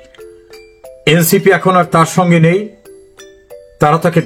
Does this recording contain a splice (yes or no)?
no